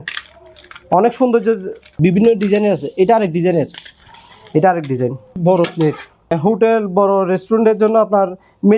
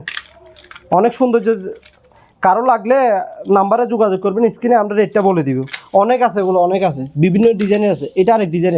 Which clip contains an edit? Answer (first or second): first